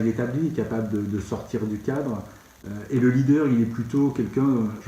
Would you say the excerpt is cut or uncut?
uncut